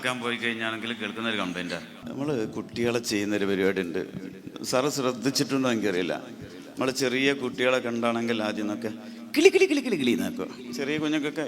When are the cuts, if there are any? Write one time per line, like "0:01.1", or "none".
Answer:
0:02.0